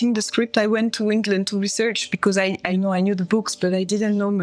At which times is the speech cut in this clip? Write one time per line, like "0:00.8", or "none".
0:02.7